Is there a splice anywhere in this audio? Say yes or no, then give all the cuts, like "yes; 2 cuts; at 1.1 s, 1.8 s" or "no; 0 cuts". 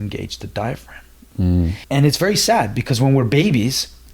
yes; 1 cut; at 1.8 s